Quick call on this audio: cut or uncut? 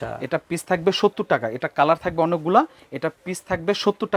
uncut